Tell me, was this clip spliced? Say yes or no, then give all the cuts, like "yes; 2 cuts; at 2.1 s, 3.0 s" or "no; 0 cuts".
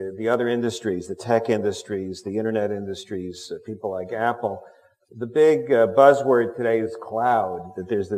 yes; 1 cut; at 6.7 s